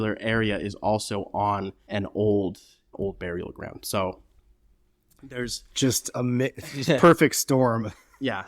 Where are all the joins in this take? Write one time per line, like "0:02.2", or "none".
0:02.9